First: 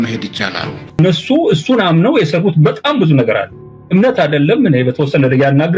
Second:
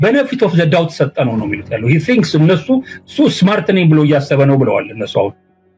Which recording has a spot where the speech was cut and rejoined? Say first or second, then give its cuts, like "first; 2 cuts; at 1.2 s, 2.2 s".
first; 1 cut; at 1.0 s